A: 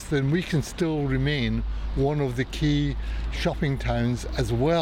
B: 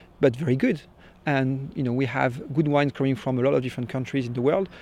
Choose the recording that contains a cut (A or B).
B